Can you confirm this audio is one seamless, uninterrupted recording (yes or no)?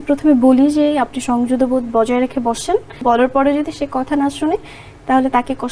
no